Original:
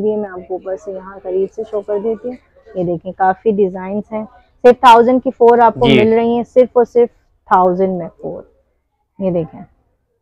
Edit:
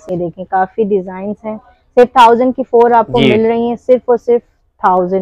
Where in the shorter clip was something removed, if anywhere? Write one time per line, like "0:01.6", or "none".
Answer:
none

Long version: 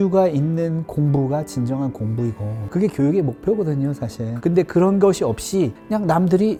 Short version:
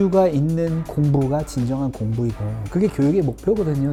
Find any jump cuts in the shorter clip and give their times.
none

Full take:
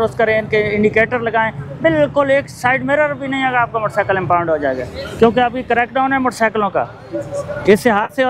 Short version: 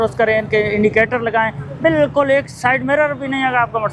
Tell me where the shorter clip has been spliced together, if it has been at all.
none

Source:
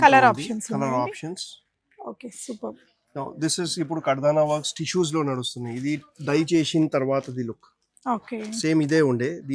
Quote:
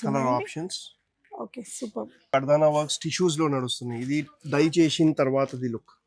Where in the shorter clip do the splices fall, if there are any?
0:02.3

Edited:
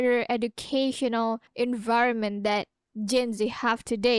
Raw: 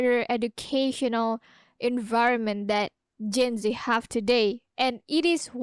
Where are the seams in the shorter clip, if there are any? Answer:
0:01.5

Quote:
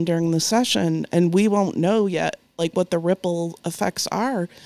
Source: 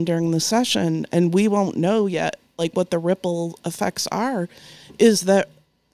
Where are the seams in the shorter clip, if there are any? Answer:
none

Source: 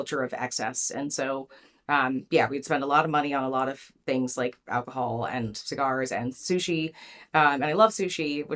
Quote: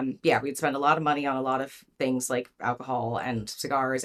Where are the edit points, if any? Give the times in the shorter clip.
none

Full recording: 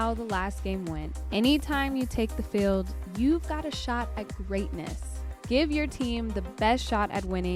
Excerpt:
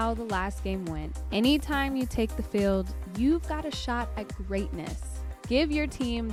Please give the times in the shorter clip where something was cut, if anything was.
none

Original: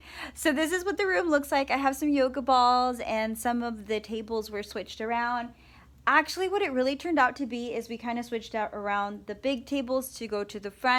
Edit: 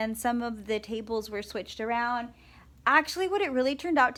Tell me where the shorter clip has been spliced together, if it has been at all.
none

